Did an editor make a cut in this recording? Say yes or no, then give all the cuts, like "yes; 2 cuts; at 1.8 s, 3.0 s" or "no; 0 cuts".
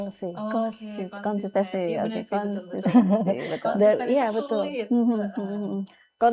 no; 0 cuts